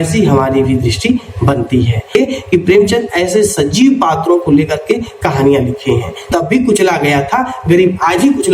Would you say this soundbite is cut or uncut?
cut